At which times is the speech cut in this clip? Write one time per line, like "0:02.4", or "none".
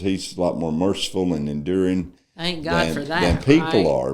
none